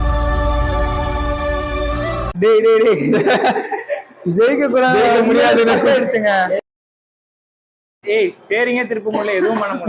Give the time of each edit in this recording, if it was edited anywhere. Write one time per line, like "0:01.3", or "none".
none